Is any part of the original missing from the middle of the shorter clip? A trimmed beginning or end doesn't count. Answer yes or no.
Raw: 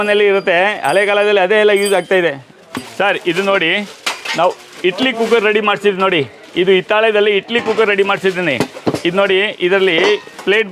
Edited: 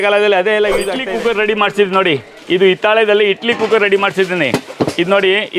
yes